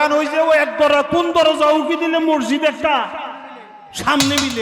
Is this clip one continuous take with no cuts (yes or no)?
yes